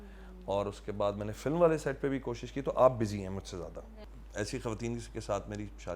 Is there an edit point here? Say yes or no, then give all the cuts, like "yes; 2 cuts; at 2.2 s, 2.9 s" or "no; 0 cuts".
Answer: yes; 1 cut; at 3.9 s